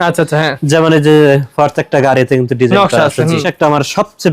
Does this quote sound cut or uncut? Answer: cut